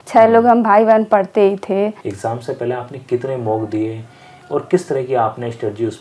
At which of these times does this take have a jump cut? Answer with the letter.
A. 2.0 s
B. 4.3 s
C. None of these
A